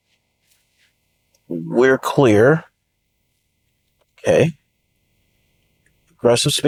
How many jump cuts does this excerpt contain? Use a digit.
0